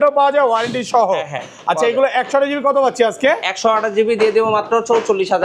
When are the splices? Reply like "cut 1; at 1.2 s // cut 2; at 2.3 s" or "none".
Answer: none